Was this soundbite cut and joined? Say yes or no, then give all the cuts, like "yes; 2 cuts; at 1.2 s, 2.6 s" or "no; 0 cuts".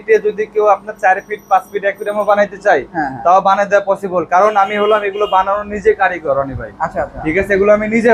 no; 0 cuts